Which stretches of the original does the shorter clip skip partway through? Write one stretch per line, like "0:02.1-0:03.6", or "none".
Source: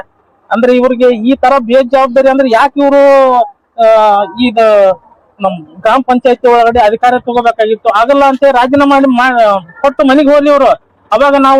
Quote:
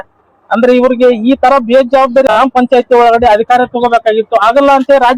0:02.2-0:05.8